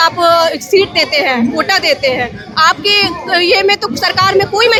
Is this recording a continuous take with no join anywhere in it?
yes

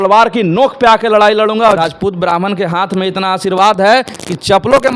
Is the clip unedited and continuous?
no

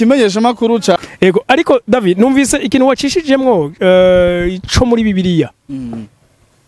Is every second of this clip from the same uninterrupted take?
no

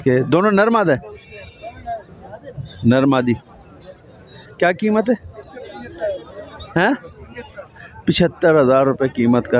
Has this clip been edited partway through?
no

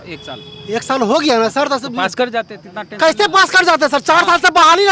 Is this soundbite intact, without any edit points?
yes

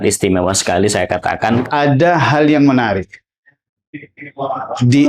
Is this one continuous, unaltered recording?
no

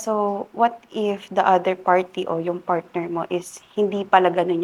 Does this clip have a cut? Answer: no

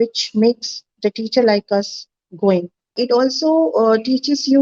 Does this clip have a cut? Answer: yes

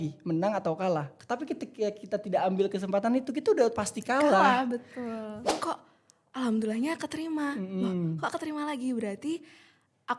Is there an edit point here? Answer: yes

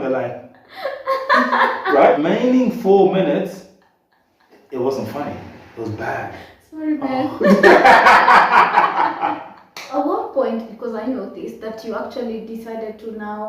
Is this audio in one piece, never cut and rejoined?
no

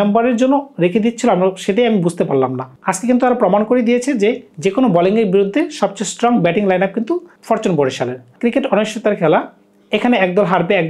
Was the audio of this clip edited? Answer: yes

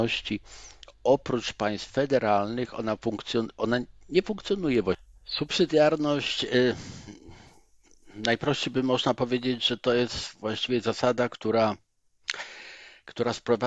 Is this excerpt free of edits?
no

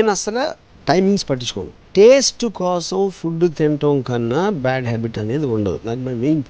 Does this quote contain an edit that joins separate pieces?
yes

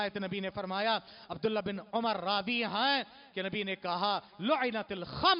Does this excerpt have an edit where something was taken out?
no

